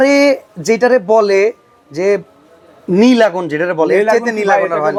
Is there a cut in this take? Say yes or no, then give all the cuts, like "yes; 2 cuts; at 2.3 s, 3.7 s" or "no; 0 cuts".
no; 0 cuts